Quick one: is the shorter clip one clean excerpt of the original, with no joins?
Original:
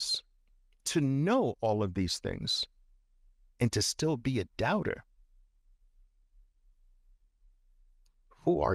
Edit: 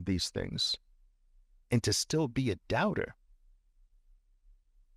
yes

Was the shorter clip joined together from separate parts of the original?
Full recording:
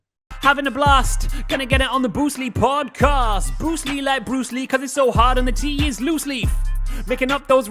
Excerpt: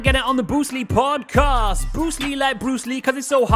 no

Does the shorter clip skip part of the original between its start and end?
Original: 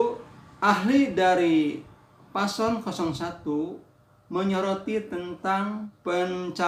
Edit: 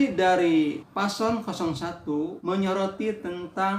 yes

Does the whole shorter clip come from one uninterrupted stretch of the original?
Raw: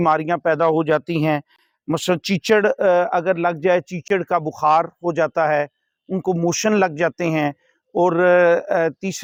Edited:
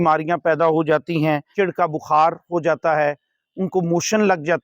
no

